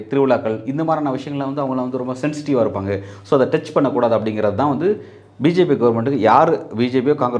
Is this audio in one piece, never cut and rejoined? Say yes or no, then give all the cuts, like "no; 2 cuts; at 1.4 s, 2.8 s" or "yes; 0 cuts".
yes; 0 cuts